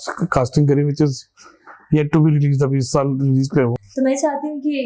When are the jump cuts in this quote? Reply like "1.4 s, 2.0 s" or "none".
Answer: 3.8 s